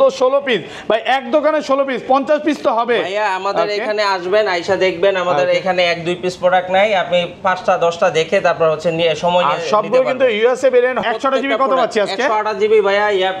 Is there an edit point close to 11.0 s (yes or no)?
yes